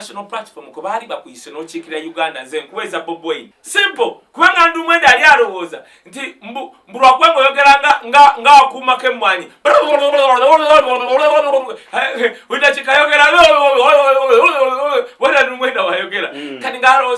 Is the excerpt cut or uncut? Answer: uncut